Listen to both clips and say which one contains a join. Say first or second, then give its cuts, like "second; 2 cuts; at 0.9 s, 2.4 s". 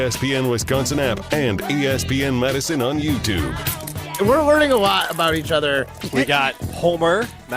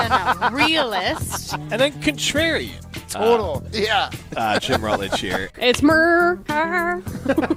first; 1 cut; at 4.1 s